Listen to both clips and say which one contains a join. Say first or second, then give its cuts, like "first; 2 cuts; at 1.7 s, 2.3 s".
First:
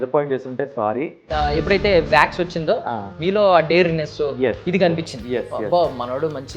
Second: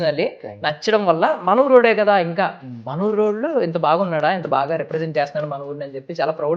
first; 1 cut; at 1.2 s